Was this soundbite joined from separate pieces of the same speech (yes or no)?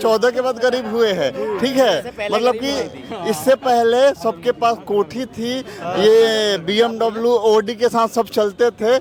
no